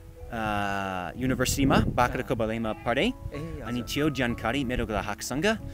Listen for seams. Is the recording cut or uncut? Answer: uncut